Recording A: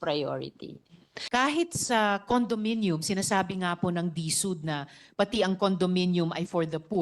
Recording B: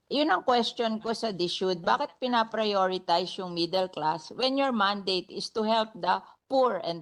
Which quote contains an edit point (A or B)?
A